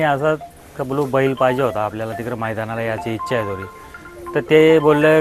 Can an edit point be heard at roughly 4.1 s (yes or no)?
no